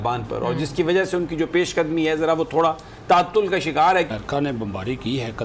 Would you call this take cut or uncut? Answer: cut